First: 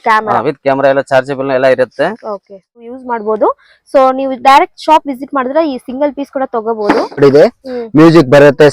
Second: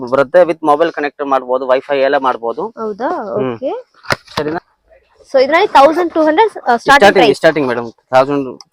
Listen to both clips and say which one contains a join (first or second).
first